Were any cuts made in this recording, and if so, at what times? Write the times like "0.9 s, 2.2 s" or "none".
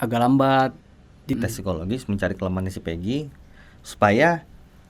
1.4 s